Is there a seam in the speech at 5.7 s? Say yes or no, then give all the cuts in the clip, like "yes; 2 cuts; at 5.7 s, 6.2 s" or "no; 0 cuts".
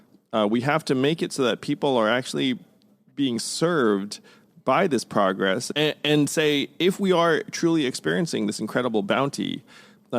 yes; 1 cut; at 5.7 s